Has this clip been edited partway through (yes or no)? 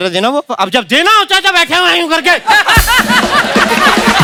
no